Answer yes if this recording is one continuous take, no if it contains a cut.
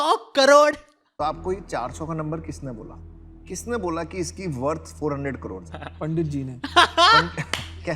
no